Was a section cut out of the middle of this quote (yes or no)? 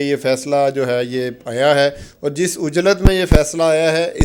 no